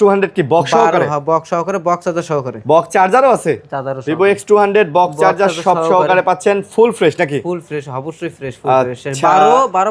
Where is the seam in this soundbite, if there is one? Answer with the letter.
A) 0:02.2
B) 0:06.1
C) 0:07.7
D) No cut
D